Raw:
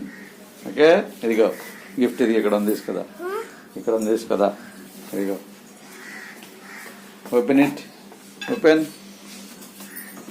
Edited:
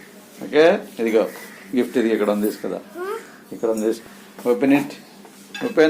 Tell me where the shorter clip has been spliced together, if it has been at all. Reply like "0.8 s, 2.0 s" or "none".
4.0 s